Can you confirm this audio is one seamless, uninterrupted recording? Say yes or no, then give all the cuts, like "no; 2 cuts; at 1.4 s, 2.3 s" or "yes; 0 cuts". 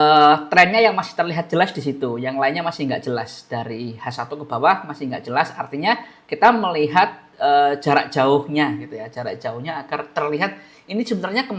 yes; 0 cuts